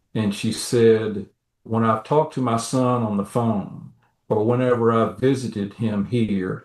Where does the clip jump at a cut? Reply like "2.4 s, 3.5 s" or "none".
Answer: 1.6 s